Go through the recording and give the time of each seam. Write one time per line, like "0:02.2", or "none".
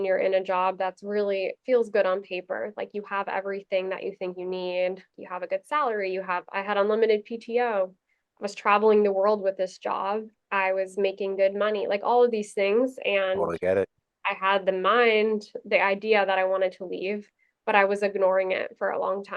0:05.2
0:10.4